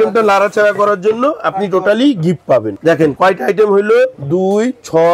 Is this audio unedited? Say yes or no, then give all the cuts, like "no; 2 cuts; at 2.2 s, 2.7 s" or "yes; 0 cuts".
yes; 0 cuts